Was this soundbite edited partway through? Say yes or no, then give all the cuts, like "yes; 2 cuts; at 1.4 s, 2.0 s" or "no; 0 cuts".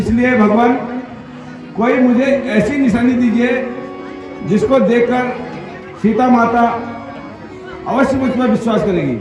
no; 0 cuts